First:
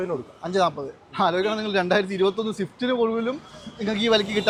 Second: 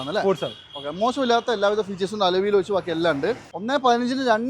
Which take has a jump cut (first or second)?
second